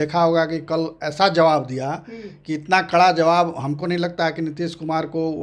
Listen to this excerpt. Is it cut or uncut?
uncut